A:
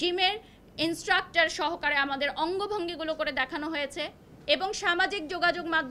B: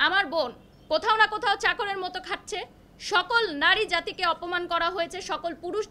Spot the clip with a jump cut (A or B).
A